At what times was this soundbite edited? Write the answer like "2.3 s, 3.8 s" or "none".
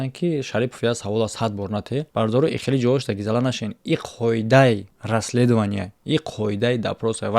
2.1 s, 4.9 s